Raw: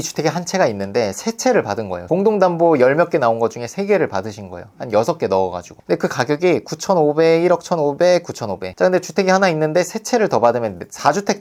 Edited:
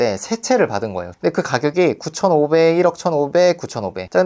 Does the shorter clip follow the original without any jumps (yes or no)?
no